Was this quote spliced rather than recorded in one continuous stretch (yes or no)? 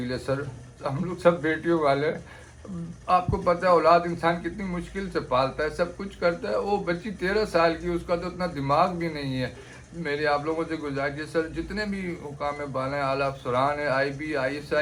no